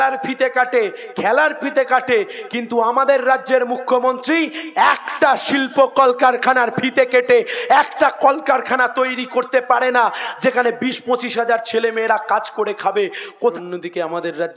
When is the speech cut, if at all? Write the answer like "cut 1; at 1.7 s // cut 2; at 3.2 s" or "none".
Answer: cut 1; at 13.5 s